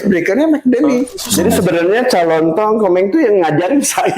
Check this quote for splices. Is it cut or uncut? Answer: cut